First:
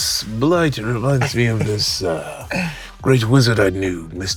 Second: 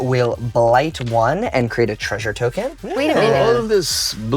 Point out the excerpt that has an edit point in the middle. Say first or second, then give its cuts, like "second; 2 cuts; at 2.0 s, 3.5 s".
second; 1 cut; at 2.8 s